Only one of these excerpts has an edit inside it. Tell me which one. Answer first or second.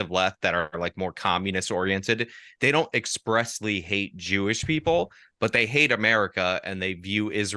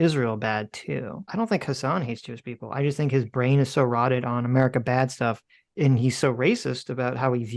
second